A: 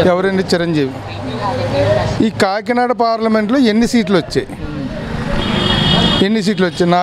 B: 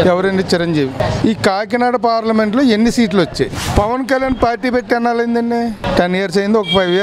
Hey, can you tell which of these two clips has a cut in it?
B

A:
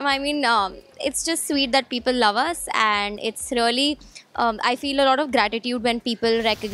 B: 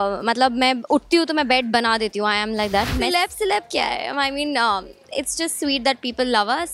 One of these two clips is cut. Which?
B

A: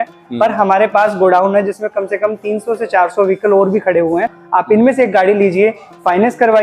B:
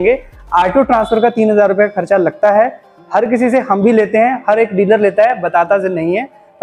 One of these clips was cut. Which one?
A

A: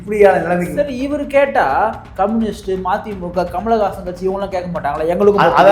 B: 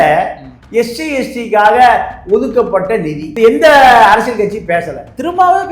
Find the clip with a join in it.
B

